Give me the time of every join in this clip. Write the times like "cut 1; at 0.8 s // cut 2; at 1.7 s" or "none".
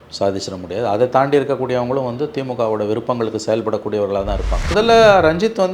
cut 1; at 4.7 s